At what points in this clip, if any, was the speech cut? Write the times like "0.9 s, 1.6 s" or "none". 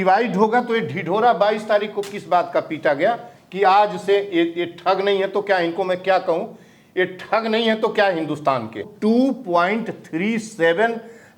8.9 s